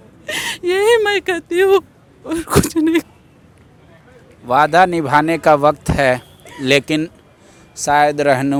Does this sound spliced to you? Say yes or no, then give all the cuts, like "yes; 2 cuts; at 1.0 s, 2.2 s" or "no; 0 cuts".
no; 0 cuts